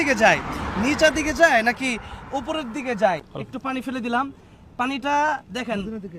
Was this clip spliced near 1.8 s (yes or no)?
no